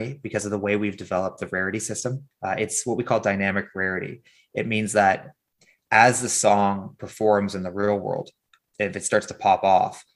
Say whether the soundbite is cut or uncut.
cut